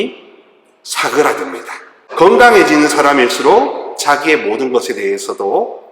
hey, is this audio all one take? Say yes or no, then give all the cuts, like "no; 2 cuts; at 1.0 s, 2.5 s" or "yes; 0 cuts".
no; 1 cut; at 2.1 s